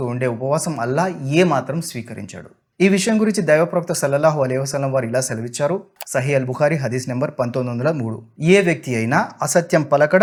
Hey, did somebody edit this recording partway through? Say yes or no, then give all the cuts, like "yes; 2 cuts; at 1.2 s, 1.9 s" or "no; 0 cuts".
no; 0 cuts